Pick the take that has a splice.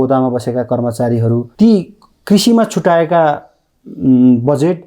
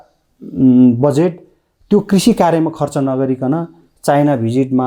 first; 1 cut; at 1.5 s

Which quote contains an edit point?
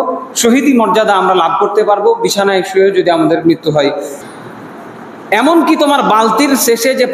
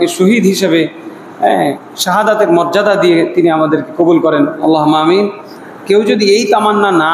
first; 1 cut; at 4.2 s

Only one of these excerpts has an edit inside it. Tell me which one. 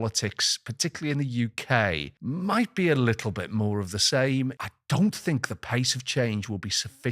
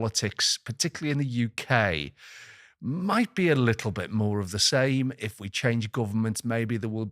first; 2 cuts; at 2.1 s, 4.7 s

